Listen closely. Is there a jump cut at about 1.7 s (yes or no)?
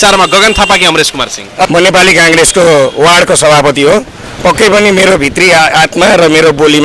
yes